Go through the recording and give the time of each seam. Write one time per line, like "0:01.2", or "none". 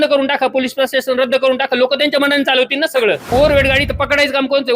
0:03.3